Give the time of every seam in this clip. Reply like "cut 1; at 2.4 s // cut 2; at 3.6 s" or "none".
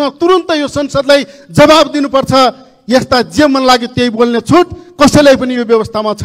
none